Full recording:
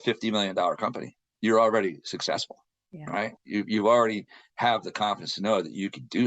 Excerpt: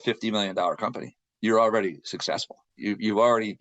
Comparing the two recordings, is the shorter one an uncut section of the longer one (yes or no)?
no